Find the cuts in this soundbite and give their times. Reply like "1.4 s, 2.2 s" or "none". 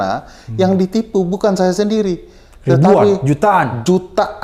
none